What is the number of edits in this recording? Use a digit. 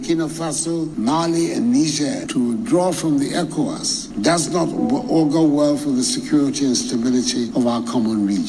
3